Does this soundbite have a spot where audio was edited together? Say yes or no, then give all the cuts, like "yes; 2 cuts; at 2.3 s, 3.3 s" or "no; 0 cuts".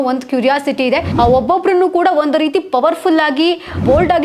yes; 1 cut; at 1.1 s